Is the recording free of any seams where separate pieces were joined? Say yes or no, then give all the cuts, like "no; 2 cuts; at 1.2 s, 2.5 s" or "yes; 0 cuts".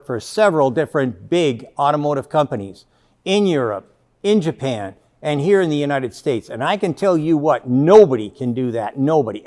yes; 0 cuts